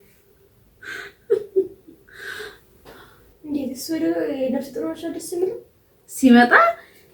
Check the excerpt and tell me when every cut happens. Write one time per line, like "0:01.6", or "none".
0:03.2